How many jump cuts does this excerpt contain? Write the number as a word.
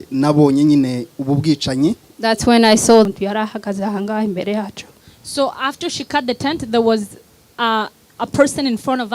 one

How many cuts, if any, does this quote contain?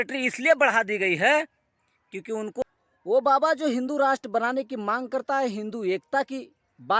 one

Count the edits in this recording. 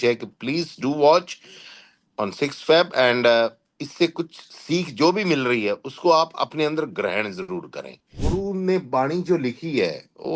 one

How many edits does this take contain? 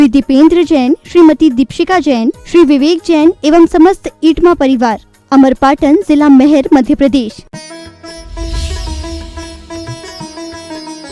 one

